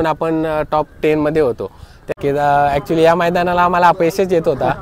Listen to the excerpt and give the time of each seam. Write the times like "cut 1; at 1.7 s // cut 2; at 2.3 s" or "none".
cut 1; at 2.1 s